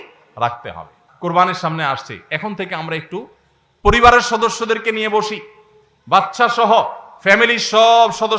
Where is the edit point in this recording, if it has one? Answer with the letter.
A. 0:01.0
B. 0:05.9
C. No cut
A